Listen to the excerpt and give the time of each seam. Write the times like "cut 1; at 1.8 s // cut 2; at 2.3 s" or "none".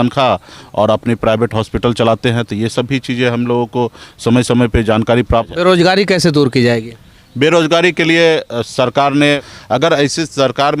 cut 1; at 5.5 s // cut 2; at 9.5 s